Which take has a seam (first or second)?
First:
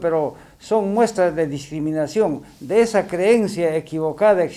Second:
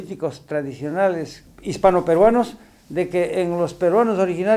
second